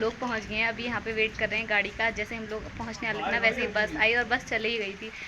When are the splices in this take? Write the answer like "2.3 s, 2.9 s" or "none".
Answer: none